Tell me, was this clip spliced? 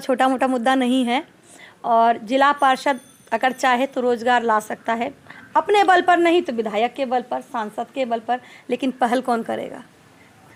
no; 0 cuts

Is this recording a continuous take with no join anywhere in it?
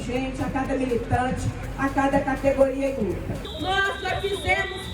no; 1 cut; at 3.4 s

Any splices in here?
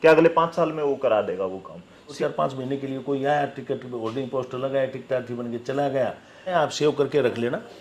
yes; 2 cuts; at 2.2 s, 6.5 s

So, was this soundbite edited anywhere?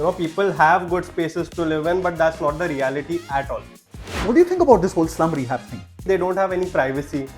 yes; 2 cuts; at 4.2 s, 6.0 s

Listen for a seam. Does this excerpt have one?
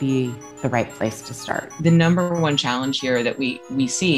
yes; 1 cut; at 1.7 s

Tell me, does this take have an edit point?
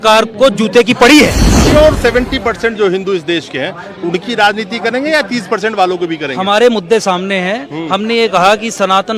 yes; 1 cut; at 1.6 s

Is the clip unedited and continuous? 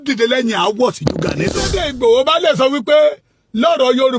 no; 1 cut; at 1.7 s

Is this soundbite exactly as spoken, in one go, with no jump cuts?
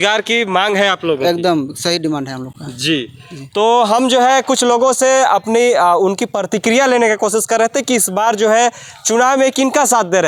yes; 0 cuts

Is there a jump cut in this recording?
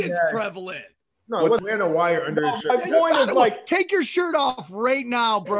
yes; 1 cut; at 1.6 s

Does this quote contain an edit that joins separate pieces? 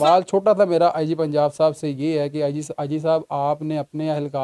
no; 0 cuts

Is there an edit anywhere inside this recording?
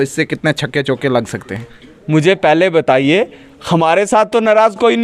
no; 0 cuts

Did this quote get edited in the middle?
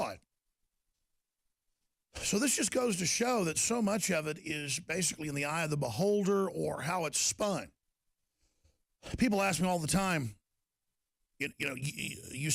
no; 0 cuts

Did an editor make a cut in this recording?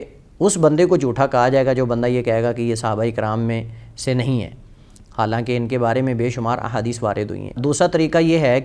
no; 0 cuts

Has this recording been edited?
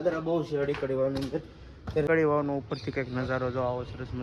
yes; 1 cut; at 2.1 s

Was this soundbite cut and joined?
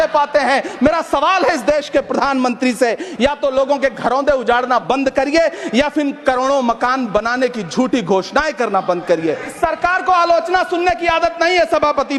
no; 0 cuts

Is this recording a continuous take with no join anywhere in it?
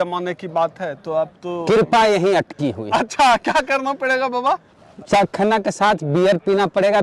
yes; 0 cuts

